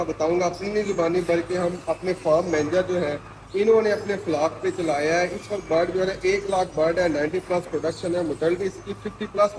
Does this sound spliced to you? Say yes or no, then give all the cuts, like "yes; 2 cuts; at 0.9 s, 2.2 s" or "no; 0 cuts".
no; 0 cuts